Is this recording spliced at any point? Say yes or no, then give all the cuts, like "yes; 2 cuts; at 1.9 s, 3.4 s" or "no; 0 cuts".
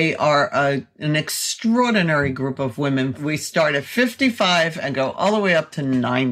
yes; 1 cut; at 3.2 s